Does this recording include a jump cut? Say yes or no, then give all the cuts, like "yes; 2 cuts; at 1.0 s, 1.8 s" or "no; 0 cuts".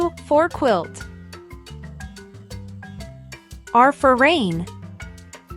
yes; 3 cuts; at 0.9 s, 3.3 s, 4.7 s